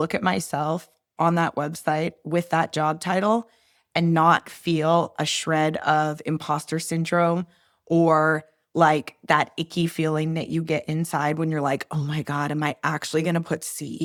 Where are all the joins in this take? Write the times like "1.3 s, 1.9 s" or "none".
none